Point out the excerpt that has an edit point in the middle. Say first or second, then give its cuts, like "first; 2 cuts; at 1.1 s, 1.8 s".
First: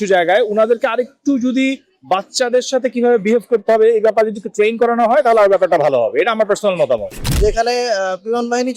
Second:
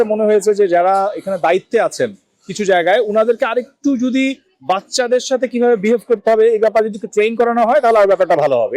first; 1 cut; at 7.2 s